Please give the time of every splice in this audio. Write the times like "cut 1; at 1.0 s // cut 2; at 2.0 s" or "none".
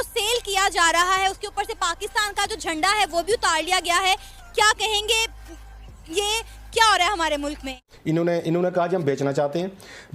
cut 1; at 7.9 s